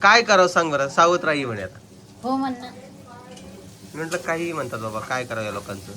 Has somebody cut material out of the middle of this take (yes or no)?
no